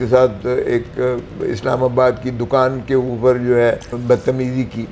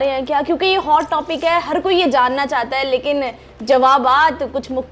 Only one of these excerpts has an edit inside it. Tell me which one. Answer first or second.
first